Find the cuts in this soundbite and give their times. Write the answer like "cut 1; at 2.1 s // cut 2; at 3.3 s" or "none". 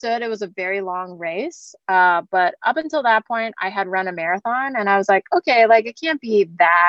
none